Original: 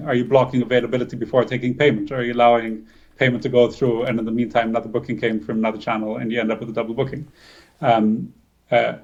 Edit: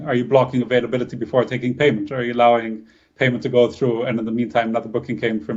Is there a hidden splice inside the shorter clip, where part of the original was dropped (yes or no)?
no